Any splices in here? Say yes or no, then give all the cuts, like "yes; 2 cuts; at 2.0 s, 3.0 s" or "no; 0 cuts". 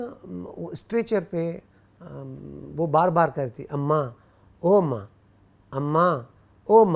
no; 0 cuts